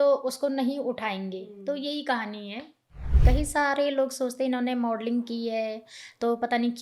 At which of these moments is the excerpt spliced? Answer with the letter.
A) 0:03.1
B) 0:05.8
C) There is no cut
A